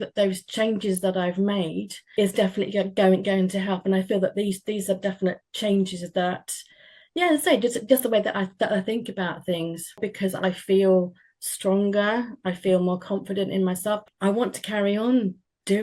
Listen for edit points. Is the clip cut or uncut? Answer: cut